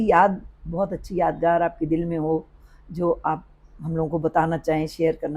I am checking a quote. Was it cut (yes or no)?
no